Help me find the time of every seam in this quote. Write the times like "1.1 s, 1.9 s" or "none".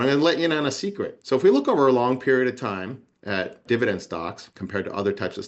1.1 s